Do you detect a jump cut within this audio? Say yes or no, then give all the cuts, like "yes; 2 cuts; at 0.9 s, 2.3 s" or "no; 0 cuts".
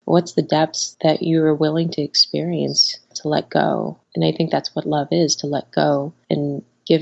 yes; 1 cut; at 4.0 s